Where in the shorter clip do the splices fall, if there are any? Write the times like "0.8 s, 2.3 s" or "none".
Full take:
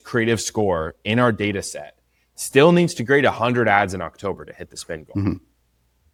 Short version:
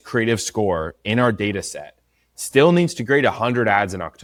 none

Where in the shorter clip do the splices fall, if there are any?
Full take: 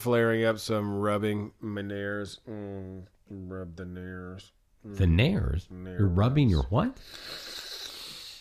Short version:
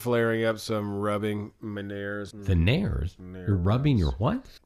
2.3 s

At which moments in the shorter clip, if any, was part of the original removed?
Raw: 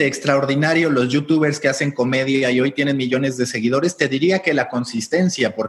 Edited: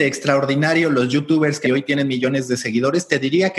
1.6 s

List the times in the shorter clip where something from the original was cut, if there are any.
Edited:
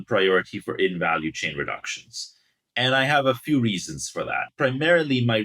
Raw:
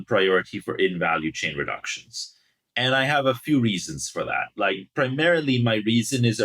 4.5 s

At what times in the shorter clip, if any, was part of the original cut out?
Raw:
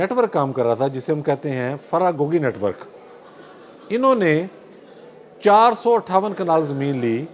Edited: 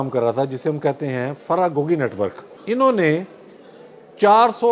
2.5 s

